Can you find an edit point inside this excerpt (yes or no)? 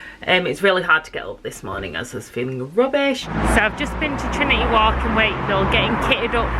yes